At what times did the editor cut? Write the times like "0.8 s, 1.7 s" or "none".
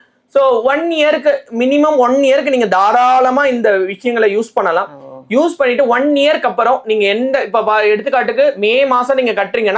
none